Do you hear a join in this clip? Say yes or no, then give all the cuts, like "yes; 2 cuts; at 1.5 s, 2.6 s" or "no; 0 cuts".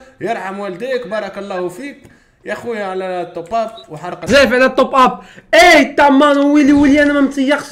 yes; 1 cut; at 4.3 s